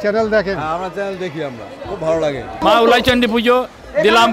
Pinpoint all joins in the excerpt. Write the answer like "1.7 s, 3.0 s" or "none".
2.5 s